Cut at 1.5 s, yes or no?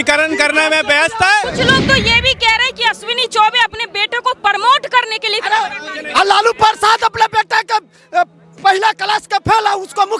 yes